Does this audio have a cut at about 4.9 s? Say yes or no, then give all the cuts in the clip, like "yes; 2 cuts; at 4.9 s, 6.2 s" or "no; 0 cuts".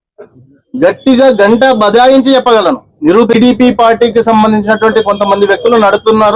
no; 1 cut; at 3.3 s